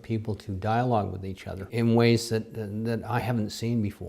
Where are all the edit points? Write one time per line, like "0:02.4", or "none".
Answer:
0:01.7